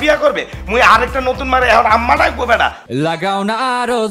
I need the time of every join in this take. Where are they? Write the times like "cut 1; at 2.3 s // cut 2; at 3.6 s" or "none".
cut 1; at 2.9 s